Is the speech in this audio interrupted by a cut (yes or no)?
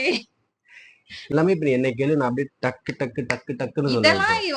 yes